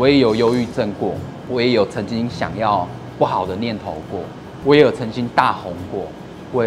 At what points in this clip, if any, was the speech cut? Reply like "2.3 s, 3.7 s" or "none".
none